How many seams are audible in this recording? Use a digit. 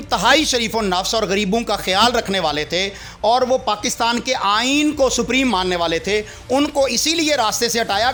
0